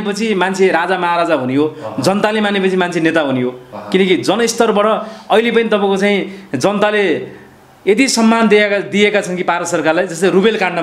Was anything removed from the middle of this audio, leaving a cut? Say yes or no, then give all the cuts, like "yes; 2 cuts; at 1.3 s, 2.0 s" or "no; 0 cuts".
no; 0 cuts